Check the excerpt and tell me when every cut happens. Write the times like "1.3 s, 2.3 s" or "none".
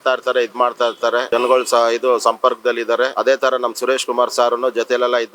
1.3 s, 3.2 s